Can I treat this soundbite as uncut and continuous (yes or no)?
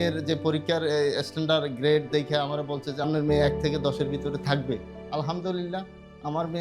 no